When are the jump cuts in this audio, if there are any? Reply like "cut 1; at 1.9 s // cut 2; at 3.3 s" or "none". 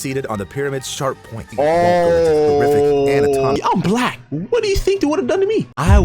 cut 1; at 1.5 s // cut 2; at 3.6 s